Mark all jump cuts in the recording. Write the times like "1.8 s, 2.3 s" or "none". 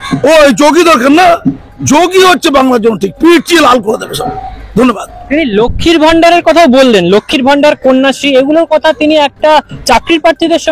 none